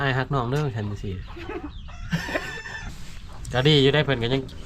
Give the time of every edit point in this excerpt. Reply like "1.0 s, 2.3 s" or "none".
2.8 s